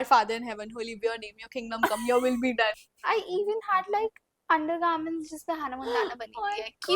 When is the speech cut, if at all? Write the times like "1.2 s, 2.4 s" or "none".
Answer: 2.8 s